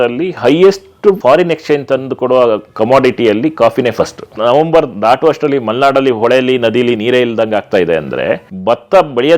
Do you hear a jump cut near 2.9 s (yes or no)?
no